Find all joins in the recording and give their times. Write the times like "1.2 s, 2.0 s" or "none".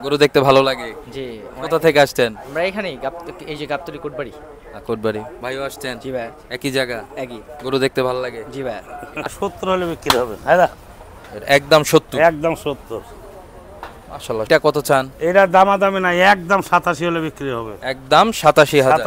9.3 s, 14.5 s